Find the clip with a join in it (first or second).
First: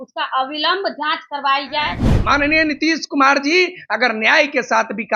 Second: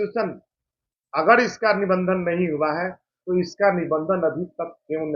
first